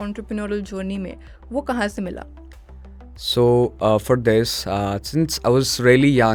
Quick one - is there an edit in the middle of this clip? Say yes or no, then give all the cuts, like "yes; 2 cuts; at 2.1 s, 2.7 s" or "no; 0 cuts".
no; 0 cuts